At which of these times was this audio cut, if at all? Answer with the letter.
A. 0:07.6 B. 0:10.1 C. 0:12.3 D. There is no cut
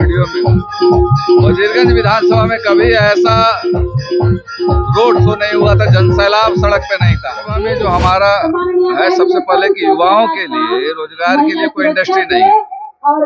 A